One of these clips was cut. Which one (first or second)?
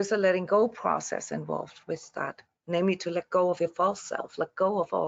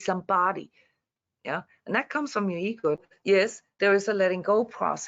second